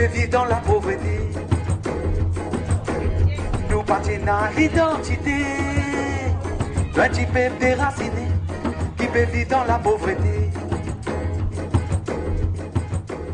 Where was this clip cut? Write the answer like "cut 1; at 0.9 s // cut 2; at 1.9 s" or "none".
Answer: none